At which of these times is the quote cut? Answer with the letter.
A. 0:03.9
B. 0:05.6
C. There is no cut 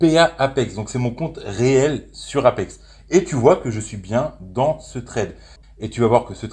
B